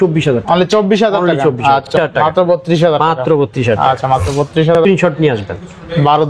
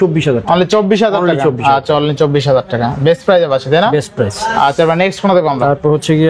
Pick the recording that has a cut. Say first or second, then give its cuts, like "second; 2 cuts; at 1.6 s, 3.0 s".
first; 2 cuts; at 1.9 s, 4.8 s